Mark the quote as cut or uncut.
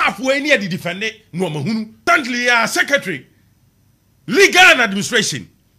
cut